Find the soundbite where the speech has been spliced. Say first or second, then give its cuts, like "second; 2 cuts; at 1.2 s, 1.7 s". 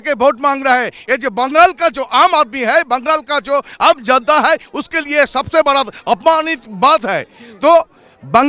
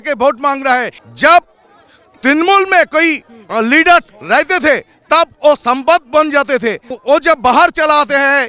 second; 2 cuts; at 1.0 s, 6.9 s